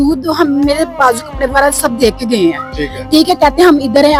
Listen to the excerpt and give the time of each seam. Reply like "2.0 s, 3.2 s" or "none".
none